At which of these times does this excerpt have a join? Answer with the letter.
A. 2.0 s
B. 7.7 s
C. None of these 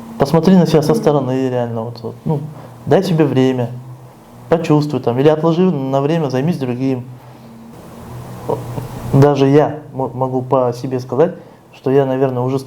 B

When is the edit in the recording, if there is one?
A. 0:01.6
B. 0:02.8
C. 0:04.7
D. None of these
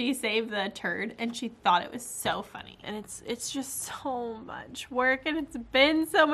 B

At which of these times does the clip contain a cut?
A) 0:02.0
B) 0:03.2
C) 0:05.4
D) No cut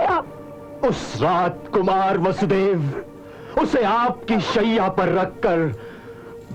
D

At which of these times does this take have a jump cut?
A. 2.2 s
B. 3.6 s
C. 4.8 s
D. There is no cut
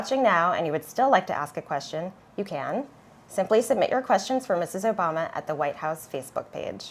A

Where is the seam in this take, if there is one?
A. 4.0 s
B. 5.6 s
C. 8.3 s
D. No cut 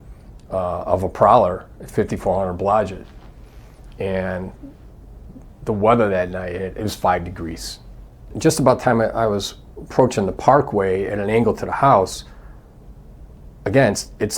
C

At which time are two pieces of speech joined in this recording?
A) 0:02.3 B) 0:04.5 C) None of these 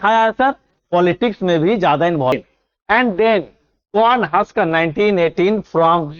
A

